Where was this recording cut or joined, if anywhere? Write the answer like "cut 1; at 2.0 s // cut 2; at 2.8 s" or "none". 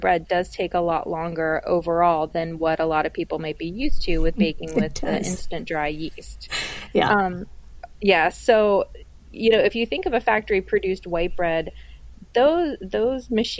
none